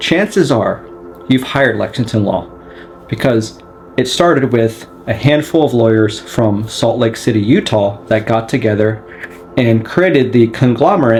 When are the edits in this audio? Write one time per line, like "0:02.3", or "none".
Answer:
none